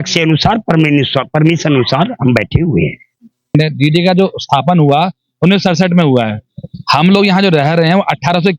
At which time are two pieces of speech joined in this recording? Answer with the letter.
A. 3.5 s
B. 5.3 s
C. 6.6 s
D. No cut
A